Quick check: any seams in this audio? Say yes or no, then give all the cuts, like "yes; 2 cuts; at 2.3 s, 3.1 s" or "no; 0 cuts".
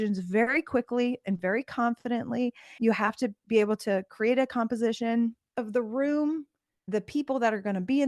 yes; 1 cut; at 2.7 s